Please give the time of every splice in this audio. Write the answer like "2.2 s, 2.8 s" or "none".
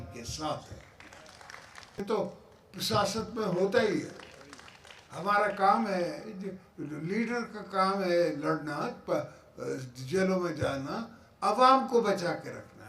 2.0 s